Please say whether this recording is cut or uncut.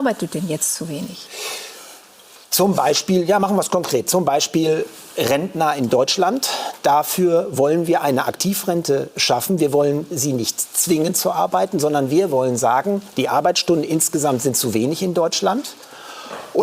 uncut